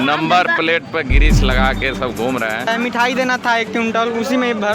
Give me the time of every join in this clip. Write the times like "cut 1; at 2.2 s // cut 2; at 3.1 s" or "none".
cut 1; at 2.7 s